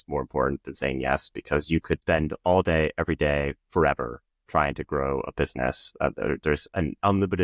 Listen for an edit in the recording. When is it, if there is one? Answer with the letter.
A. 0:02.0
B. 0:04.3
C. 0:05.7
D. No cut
A